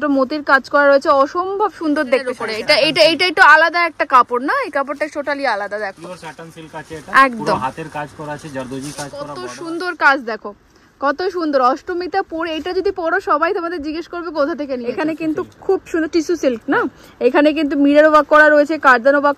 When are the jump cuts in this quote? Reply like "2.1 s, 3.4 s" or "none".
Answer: 2.5 s, 9.4 s, 14.9 s